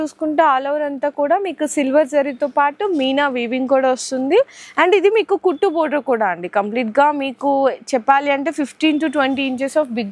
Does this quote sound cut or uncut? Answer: uncut